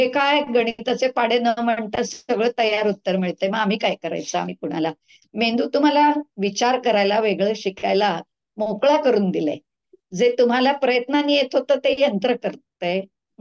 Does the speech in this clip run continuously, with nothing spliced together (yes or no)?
yes